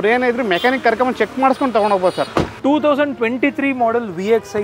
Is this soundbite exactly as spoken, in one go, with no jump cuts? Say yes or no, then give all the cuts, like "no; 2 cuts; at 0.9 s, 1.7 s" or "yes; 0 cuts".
no; 1 cut; at 2.5 s